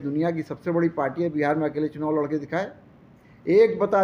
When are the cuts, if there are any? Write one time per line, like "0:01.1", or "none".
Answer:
none